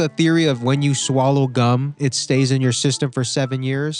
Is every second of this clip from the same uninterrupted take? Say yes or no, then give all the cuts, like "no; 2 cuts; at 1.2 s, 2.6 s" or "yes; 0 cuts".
yes; 0 cuts